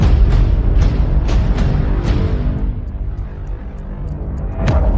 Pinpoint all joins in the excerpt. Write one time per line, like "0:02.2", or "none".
none